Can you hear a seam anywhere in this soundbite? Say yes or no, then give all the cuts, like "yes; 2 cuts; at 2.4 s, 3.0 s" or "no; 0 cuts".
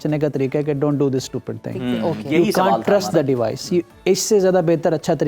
no; 0 cuts